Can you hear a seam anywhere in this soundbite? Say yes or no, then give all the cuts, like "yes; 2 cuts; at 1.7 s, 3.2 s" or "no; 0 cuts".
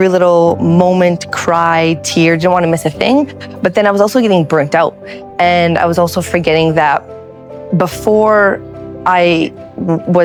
no; 0 cuts